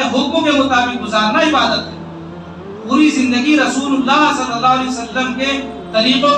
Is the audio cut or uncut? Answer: uncut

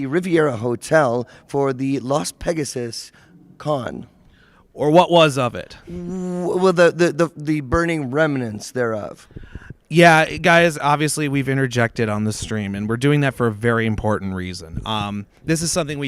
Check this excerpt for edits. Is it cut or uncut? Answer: uncut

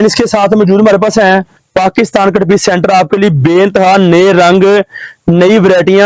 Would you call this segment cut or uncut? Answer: cut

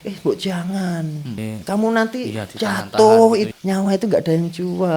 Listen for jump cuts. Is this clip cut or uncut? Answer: cut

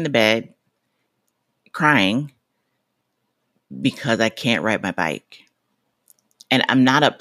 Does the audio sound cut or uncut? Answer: uncut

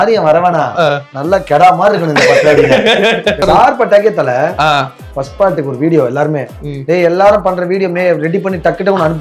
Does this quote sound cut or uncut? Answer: cut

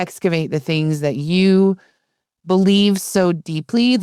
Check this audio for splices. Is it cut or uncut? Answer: uncut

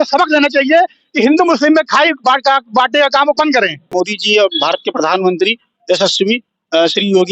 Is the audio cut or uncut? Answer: cut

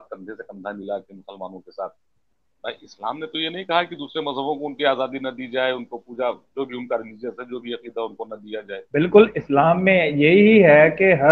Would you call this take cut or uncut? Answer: cut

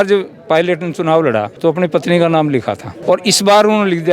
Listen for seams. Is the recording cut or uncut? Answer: cut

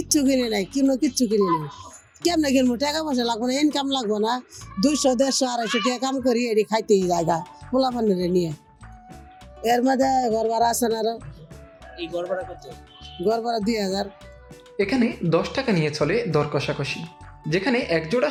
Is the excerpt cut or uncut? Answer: uncut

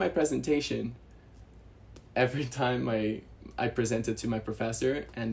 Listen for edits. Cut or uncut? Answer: uncut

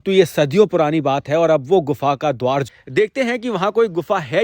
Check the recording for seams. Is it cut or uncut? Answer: cut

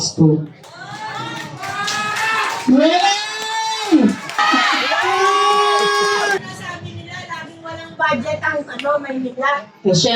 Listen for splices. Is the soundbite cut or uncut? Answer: cut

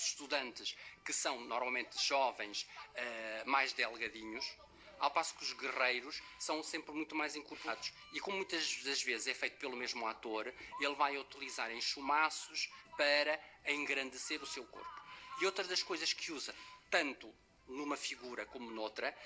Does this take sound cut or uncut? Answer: uncut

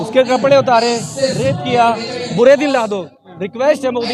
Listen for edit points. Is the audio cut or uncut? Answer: cut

